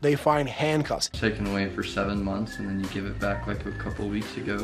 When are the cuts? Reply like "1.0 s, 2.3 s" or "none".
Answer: 1.0 s